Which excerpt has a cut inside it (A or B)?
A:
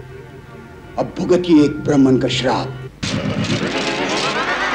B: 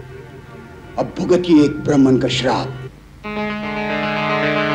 A